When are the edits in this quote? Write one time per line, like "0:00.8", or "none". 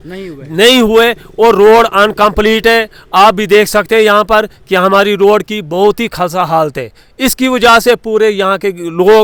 none